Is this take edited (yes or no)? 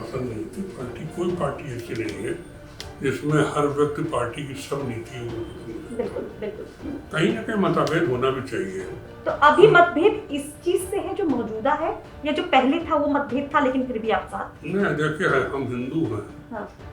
no